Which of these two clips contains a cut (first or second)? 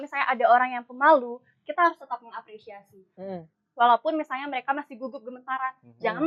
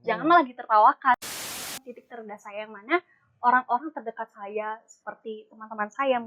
second